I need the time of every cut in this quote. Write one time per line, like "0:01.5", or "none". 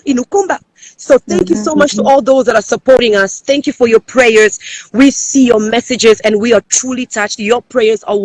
none

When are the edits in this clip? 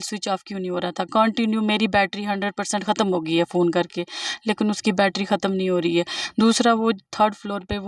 none

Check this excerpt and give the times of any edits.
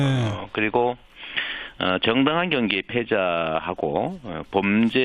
0:02.5

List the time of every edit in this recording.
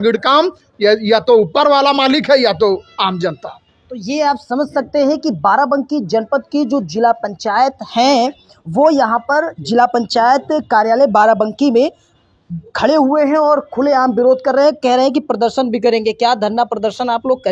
none

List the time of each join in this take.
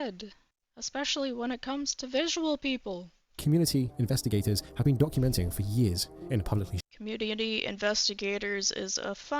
0:03.4

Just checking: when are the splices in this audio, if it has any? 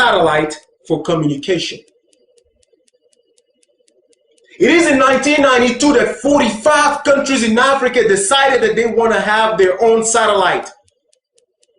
0:06.4

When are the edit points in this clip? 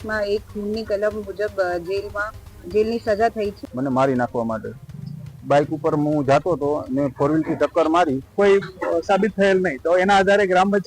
0:03.6
0:08.2

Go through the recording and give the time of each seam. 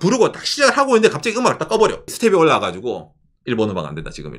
0:02.1

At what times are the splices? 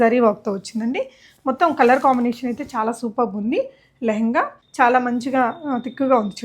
0:04.6

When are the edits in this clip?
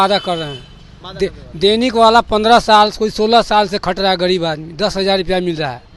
none

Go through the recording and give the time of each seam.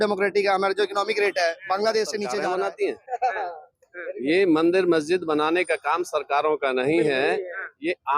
0:02.3

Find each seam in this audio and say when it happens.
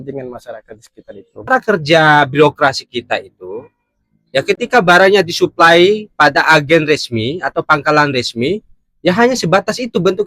0:01.5

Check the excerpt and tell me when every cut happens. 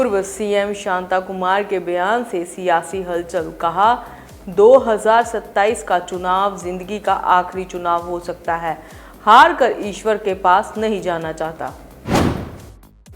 0:11.9

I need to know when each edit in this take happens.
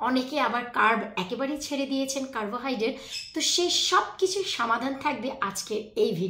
none

